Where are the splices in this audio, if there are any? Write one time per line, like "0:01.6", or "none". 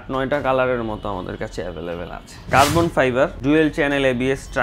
0:02.5